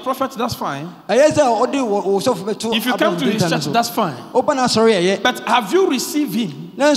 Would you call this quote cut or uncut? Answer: uncut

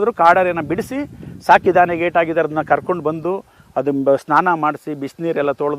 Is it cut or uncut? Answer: uncut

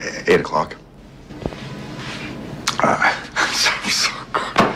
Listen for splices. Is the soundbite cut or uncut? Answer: cut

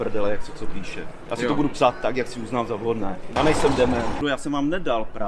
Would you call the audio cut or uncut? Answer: cut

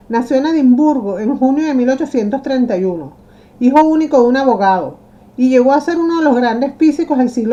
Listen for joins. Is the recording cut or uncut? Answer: uncut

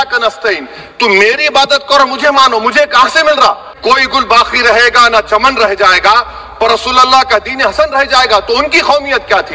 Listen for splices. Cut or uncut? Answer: cut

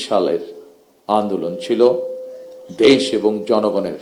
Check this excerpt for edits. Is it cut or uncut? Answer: uncut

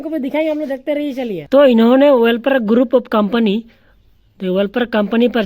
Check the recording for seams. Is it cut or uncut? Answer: cut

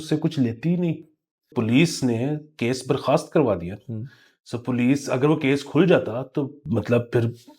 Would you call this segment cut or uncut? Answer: cut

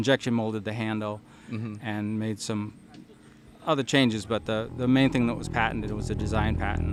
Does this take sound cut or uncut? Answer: uncut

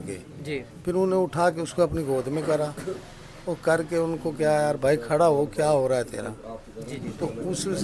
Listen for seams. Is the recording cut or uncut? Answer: uncut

